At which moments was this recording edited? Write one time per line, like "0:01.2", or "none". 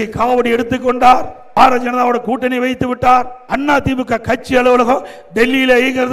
0:01.4
0:03.4